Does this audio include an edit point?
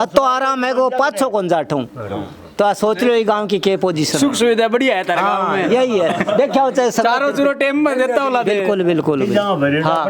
no; 0 cuts

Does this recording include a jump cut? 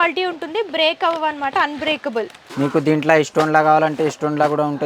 yes; 1 cut; at 2.5 s

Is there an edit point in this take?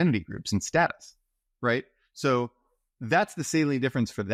no; 0 cuts

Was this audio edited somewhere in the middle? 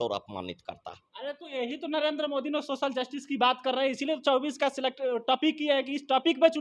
no; 0 cuts

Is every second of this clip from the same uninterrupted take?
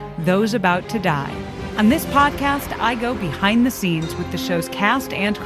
no; 1 cut; at 1.6 s

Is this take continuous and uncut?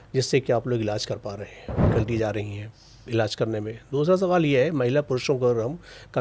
no; 1 cut; at 1.8 s

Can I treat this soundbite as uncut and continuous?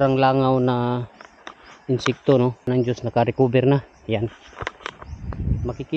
no; 1 cut; at 2.6 s

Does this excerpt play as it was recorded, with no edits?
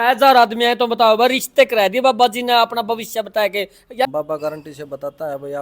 no; 1 cut; at 4.1 s

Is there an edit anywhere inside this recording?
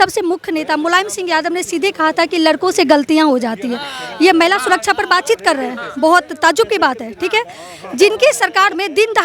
no; 0 cuts

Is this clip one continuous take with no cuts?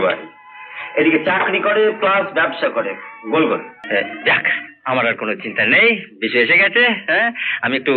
no; 1 cut; at 3.7 s

